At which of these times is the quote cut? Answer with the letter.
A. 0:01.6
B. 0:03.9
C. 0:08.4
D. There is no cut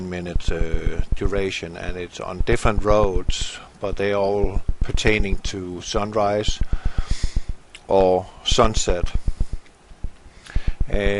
B